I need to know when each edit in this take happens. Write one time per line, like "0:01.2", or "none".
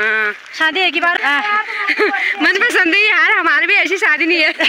0:01.1